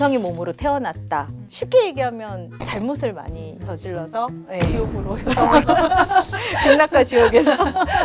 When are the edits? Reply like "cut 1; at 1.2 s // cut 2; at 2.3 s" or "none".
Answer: cut 1; at 1.1 s